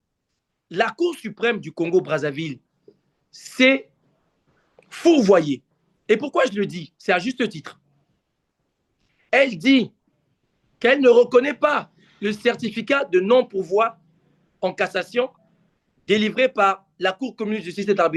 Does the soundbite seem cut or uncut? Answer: uncut